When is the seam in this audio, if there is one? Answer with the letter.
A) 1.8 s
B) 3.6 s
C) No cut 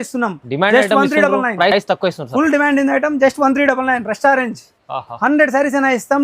C